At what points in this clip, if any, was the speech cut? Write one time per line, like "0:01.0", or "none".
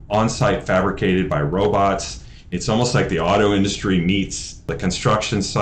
0:04.7